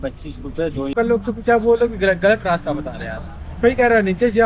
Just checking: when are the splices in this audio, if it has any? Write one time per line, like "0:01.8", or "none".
0:00.9